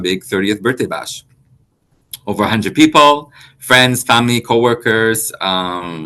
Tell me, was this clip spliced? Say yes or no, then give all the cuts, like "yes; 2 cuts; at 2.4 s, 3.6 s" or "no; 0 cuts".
no; 0 cuts